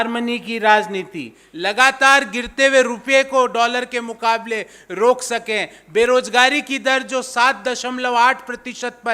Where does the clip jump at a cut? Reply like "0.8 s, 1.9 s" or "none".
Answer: 1.4 s